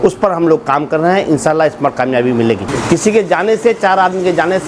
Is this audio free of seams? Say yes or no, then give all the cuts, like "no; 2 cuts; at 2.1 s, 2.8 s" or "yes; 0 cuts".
no; 1 cut; at 2.7 s